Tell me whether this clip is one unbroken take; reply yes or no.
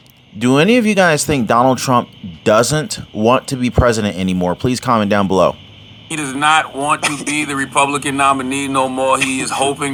yes